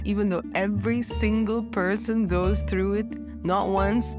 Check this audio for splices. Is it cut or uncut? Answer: uncut